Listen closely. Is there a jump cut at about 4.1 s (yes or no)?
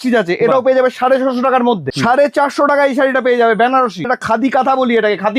yes